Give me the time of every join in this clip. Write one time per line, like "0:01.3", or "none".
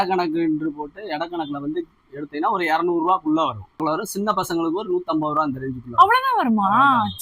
0:03.9